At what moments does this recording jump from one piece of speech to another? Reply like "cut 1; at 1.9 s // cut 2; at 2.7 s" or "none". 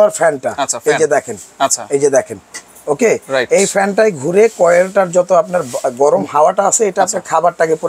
none